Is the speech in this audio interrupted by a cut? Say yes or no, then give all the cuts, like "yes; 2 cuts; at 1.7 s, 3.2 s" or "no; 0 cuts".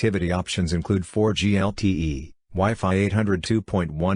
no; 0 cuts